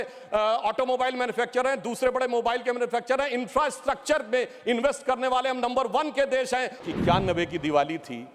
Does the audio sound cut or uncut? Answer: cut